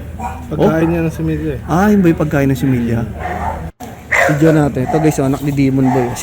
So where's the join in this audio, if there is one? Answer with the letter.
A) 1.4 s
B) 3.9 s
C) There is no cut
B